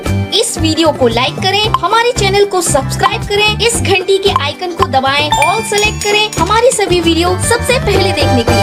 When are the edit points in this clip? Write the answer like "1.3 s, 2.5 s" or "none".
none